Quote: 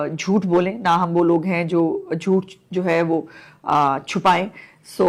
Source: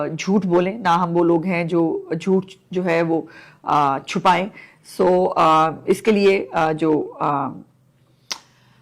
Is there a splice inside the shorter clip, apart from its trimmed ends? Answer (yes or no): no